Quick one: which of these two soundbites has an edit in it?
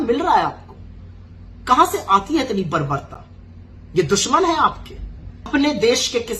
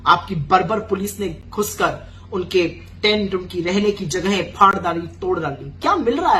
first; 1 cut; at 5.5 s

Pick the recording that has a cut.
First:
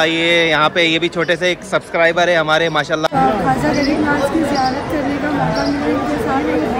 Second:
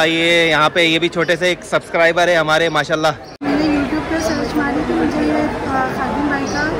first; 1 cut; at 3.1 s

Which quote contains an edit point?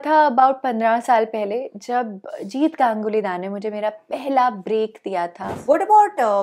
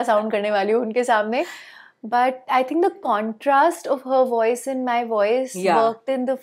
first; 1 cut; at 5.5 s

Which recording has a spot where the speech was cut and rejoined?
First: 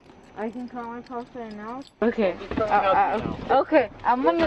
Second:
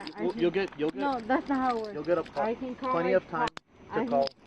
first; 1 cut; at 2.0 s

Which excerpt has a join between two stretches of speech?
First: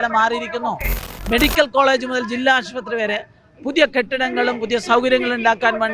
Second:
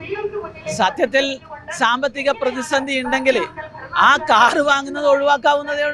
first; 1 cut; at 1.0 s

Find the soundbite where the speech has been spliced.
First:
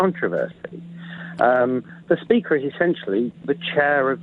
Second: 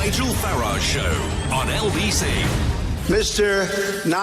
second; 1 cut; at 1.4 s

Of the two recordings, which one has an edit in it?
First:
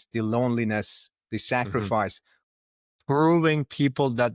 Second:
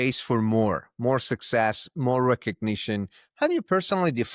first; 1 cut; at 2.5 s

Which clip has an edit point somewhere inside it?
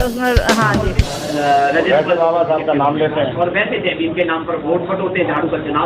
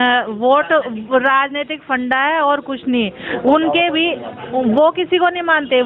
first; 1 cut; at 1.0 s

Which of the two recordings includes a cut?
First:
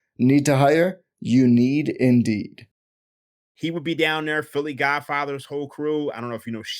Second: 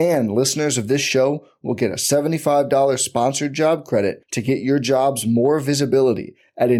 first; 1 cut; at 3.4 s

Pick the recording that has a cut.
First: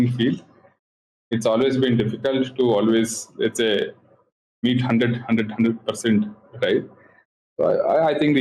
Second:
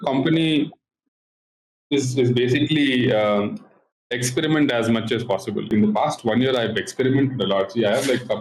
second; 1 cut; at 5.7 s

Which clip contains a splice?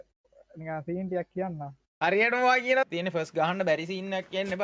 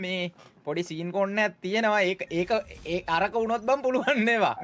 first; 1 cut; at 2.8 s

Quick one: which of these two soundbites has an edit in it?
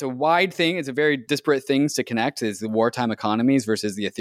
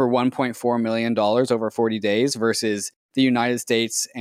first; 1 cut; at 1.2 s

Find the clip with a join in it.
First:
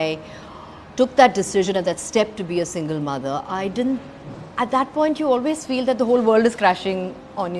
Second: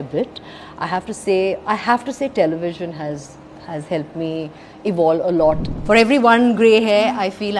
second; 1 cut; at 5.8 s

